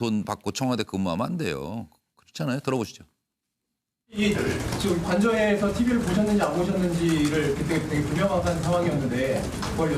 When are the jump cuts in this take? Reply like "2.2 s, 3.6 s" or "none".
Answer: 7.6 s